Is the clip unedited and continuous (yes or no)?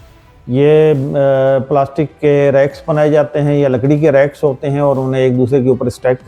yes